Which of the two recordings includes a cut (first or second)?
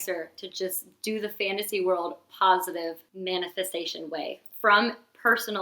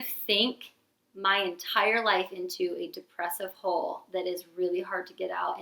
first